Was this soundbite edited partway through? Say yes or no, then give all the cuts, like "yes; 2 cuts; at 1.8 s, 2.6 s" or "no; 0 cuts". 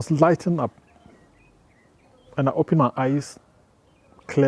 no; 0 cuts